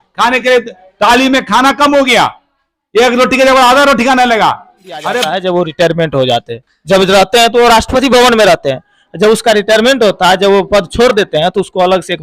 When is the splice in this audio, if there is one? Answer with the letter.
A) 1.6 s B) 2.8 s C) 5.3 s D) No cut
C